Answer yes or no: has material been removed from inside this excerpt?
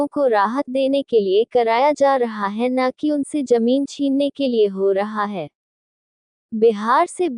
yes